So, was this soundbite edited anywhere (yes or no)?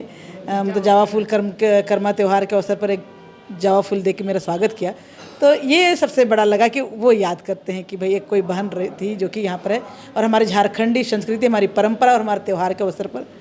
no